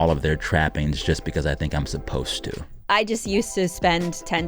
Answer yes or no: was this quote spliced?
yes